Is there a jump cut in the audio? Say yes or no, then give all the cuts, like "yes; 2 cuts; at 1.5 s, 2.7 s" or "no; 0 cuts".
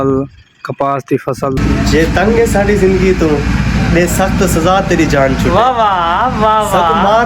yes; 1 cut; at 1.6 s